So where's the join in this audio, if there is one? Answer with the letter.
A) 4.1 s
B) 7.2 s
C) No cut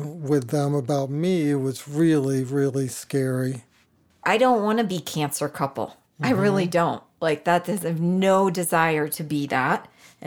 A